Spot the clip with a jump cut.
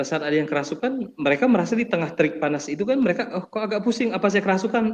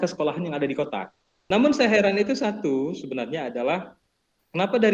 second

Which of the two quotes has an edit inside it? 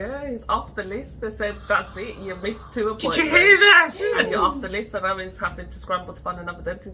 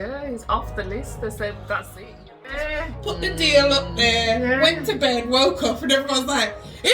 second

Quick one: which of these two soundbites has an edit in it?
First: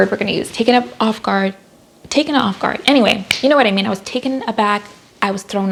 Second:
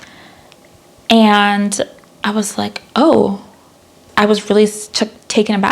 second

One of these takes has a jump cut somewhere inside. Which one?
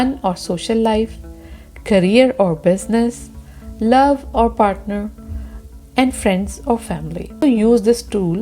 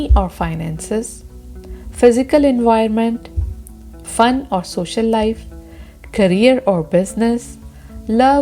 first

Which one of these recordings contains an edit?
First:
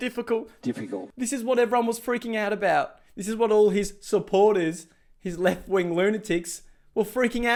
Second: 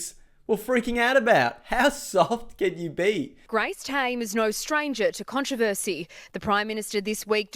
second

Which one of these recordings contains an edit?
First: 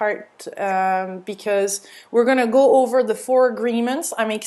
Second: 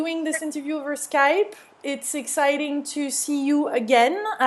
first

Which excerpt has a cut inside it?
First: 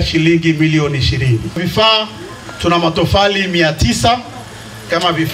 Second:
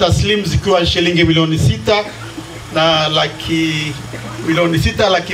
first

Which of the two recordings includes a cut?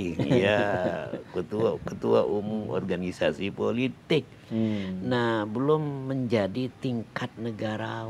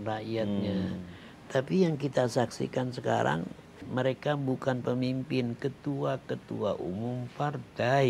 second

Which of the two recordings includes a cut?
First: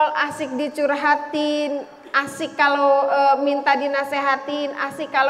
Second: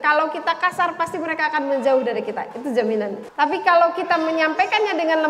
second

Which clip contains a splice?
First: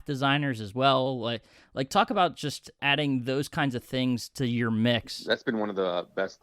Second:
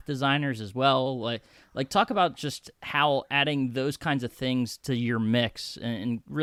first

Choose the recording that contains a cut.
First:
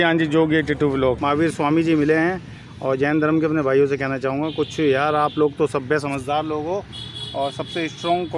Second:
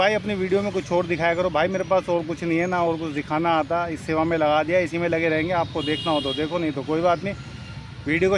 first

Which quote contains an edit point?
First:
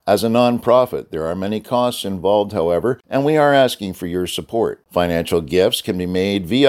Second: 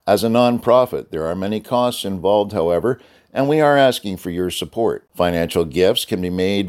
first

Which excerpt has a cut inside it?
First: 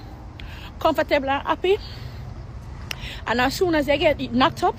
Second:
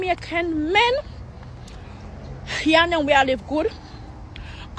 second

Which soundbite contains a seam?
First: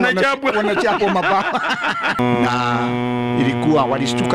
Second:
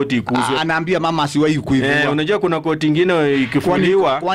first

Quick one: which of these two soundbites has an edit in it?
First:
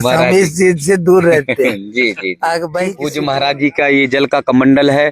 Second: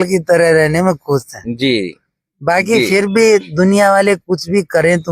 first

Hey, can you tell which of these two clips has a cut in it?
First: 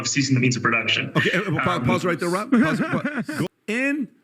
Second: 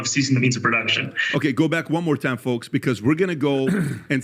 first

